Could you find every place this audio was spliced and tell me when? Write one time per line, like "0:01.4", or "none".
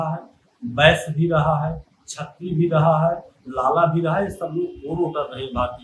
none